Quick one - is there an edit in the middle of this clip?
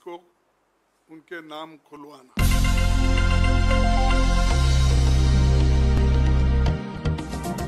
yes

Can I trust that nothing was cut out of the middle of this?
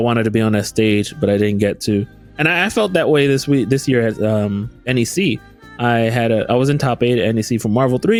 yes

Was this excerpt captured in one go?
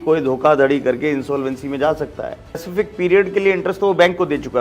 no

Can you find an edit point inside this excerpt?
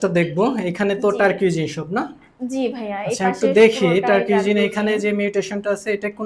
no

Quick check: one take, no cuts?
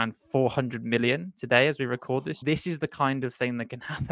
no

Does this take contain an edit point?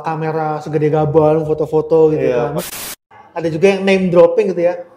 yes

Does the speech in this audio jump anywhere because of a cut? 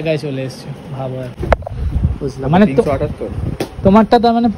no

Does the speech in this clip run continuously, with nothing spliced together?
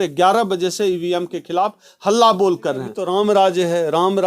no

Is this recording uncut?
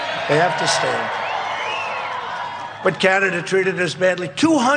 no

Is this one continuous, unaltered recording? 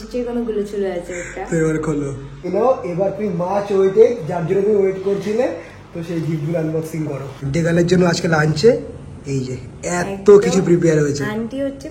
no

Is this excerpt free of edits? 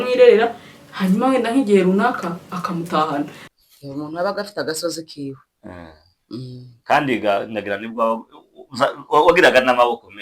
no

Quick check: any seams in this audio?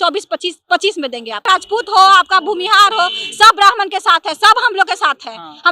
yes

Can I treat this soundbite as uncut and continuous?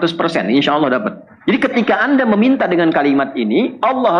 no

